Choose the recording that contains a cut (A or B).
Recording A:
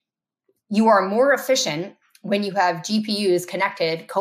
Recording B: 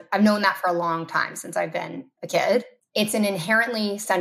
B